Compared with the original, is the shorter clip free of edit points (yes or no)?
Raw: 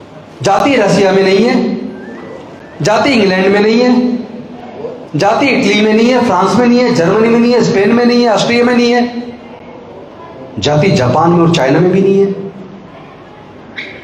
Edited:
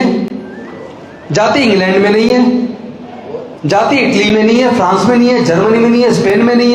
yes